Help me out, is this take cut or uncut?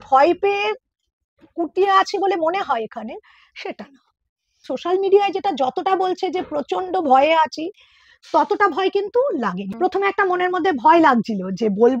cut